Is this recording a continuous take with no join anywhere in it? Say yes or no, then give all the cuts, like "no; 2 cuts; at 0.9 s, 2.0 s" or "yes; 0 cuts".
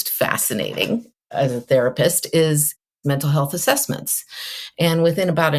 no; 1 cut; at 1.2 s